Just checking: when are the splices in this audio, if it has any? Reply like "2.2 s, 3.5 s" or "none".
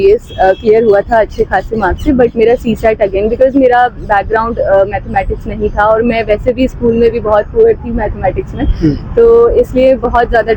none